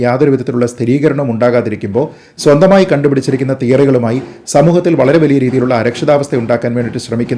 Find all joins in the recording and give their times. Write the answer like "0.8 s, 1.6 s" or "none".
none